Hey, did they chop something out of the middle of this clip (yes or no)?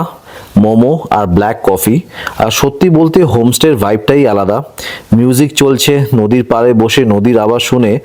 no